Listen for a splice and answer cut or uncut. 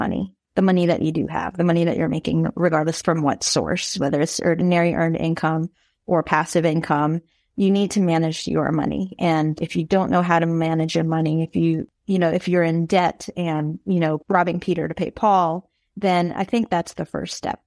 cut